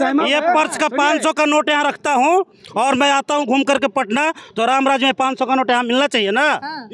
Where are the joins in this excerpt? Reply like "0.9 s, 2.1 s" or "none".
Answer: none